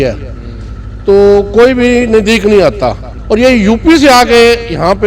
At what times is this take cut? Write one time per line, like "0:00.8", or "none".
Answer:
0:03.1